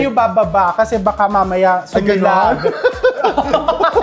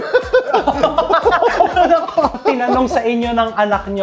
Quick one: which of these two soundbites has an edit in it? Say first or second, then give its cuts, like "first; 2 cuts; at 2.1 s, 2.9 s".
second; 1 cut; at 2.4 s